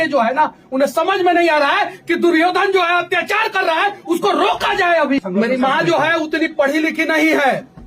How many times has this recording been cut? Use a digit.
1